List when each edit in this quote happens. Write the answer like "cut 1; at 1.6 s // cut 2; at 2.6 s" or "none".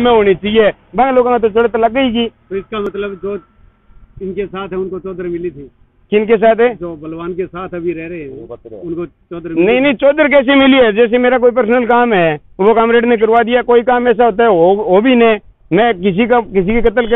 none